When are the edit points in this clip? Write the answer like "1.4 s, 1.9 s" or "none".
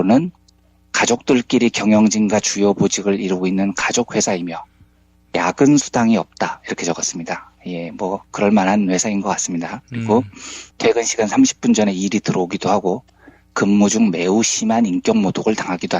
4.1 s